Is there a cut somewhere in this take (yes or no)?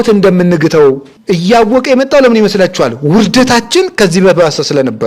yes